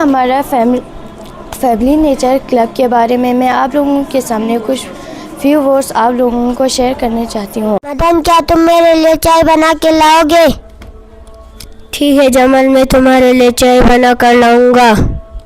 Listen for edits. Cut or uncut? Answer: cut